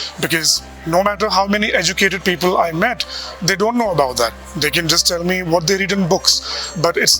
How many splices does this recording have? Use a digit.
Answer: 0